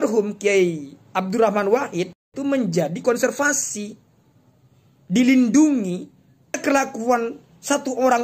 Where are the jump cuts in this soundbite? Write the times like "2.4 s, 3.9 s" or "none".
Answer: 2.3 s, 6.6 s